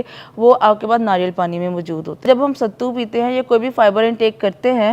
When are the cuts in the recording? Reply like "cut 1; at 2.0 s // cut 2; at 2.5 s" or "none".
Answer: cut 1; at 2.2 s